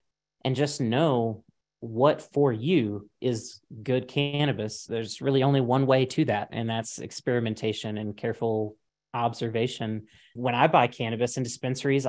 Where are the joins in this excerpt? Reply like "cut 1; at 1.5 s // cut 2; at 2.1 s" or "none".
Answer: cut 1; at 4.8 s // cut 2; at 10.3 s

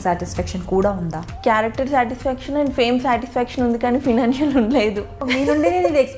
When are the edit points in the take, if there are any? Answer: cut 1; at 1.2 s // cut 2; at 5.3 s

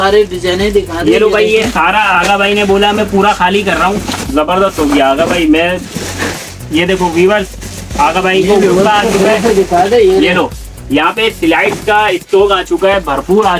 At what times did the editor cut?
none

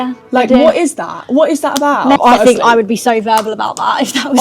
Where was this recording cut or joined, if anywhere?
cut 1; at 2.2 s

